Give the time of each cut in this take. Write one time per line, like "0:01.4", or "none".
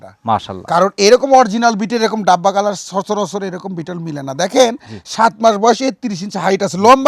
none

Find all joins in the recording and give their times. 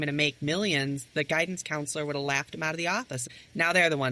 0:03.2

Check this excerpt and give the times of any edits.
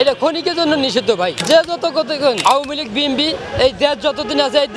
0:01.4
0:02.4

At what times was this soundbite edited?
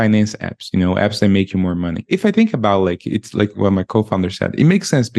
0:02.0
0:03.5

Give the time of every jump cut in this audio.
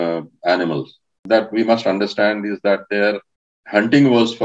0:01.2

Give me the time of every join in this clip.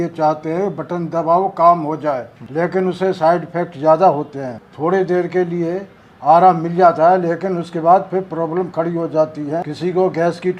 0:09.7

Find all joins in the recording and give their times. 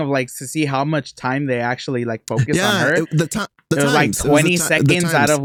none

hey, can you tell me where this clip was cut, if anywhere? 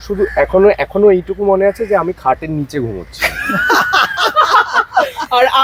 none

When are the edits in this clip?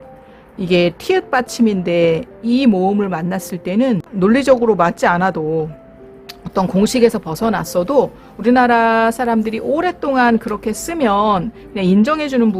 0:04.1

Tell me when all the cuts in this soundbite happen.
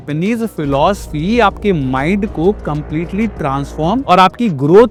none

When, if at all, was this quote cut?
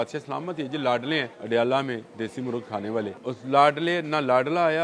0:01.3
0:03.2

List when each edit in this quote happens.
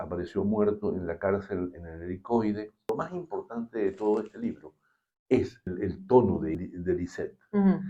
0:02.9
0:05.7
0:06.5

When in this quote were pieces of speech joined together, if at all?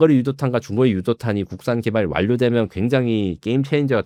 none

